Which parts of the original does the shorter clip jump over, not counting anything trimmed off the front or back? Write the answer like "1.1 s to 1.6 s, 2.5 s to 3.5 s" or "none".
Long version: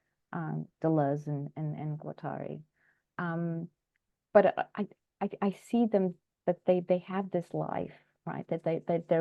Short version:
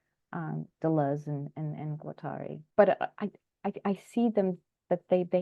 2.6 s to 4.2 s